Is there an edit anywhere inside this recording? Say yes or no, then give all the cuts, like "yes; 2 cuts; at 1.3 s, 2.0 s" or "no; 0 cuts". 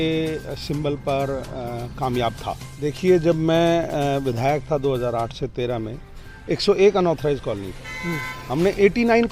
yes; 1 cut; at 2.7 s